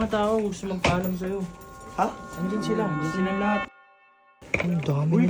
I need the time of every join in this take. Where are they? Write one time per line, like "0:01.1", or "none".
0:03.8